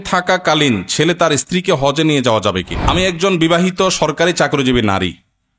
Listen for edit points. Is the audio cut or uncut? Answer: cut